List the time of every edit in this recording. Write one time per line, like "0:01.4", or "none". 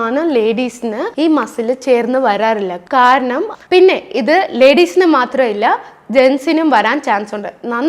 0:03.5